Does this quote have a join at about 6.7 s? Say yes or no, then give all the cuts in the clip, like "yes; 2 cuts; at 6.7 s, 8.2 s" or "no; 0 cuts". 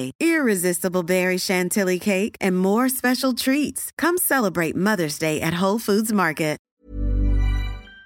yes; 1 cut; at 6.7 s